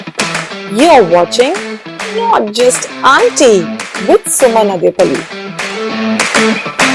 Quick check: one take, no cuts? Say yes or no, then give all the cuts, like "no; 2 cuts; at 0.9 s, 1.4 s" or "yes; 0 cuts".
yes; 0 cuts